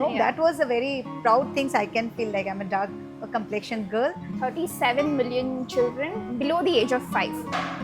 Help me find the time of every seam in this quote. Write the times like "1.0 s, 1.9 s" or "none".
4.3 s